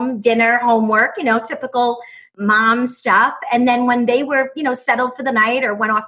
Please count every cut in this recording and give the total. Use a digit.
1